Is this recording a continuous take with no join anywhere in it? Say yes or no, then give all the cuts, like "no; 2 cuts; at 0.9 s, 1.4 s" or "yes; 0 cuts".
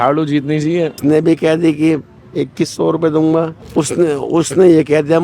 no; 2 cuts; at 1.0 s, 3.6 s